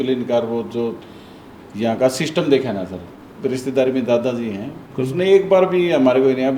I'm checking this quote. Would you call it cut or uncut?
cut